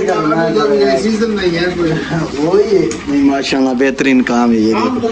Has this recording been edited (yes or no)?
no